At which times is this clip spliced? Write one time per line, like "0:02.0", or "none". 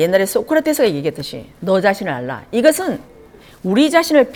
none